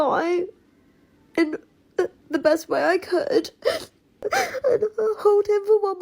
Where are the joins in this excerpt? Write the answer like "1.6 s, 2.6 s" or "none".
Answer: 4.2 s

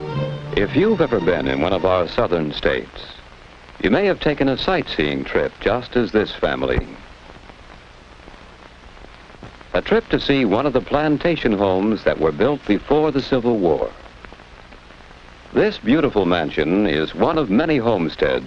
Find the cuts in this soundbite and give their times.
2.3 s

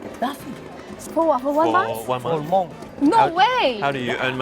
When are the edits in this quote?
0.9 s, 2.8 s

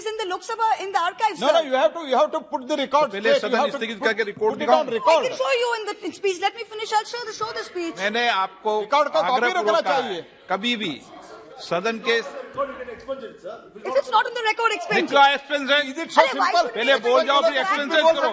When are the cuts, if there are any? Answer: none

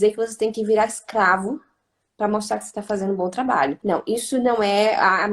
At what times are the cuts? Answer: 3.8 s

